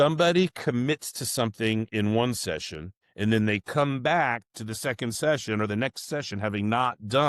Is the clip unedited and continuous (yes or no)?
yes